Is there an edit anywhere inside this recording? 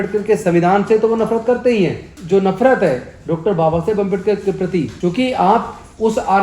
yes; 2 cuts; at 2.1 s, 4.9 s

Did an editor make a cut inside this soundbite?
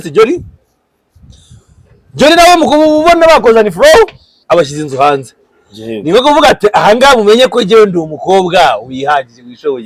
no; 0 cuts

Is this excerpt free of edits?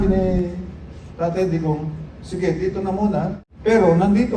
no; 1 cut; at 3.5 s

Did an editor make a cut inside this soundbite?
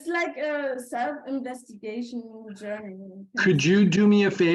no; 0 cuts

